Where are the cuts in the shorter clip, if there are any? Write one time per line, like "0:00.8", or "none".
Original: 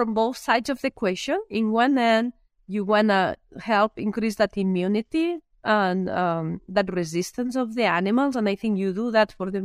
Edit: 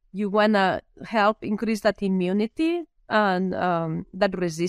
none